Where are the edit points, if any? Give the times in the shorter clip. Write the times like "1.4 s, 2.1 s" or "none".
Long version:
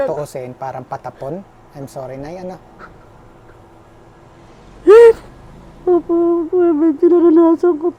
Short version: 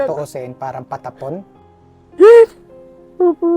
1.6 s